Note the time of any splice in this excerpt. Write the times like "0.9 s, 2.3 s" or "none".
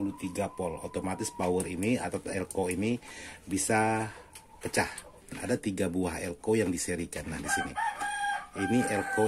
5.3 s